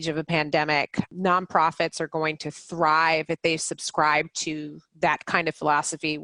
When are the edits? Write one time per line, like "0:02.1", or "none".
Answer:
0:01.1